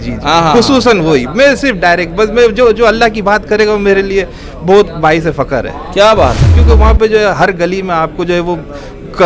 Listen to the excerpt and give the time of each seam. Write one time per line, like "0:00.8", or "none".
0:06.5